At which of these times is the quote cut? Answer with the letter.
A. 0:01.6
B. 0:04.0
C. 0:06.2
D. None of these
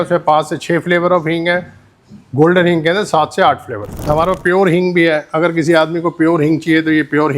B